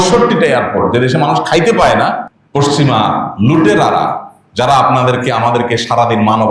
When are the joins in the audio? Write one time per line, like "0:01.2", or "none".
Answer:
0:02.3